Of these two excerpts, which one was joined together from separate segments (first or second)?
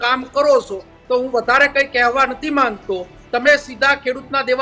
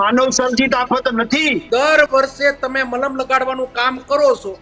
second